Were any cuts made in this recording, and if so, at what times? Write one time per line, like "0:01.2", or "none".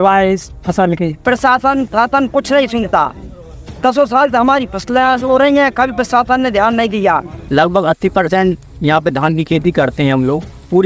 0:01.1
0:07.4